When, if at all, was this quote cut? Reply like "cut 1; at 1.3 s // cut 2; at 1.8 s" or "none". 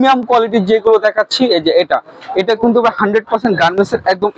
none